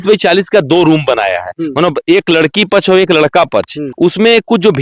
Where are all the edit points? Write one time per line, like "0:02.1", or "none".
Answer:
0:03.8